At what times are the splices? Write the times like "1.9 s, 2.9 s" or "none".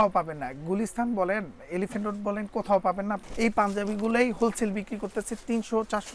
3.2 s